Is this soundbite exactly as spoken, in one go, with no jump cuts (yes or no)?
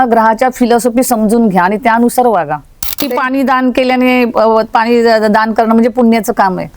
no